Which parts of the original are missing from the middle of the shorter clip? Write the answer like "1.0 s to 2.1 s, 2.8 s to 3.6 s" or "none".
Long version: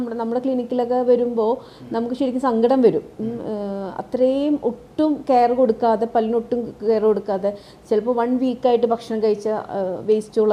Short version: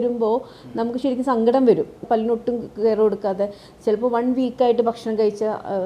3.2 s to 6.1 s